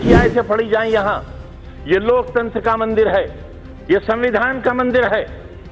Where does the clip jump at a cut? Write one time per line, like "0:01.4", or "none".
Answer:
none